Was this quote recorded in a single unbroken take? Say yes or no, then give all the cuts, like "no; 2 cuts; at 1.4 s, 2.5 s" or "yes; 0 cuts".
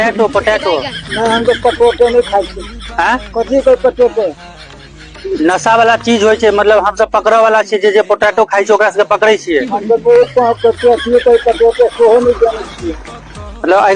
yes; 0 cuts